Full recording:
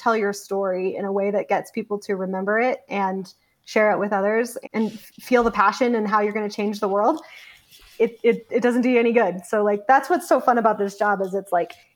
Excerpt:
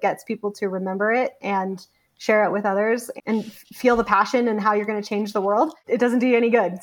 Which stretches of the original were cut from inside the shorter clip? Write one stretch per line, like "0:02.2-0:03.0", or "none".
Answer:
0:07.3-0:08.4